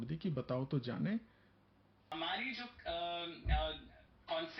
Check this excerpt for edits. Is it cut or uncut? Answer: cut